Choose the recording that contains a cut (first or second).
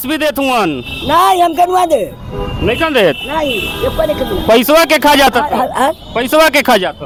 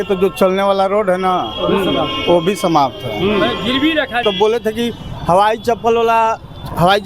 second